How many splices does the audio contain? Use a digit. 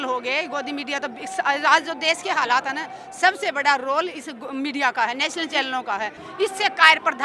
1